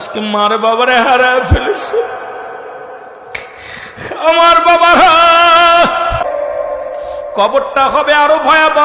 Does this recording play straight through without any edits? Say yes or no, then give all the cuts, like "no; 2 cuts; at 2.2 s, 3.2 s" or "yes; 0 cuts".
no; 1 cut; at 6.2 s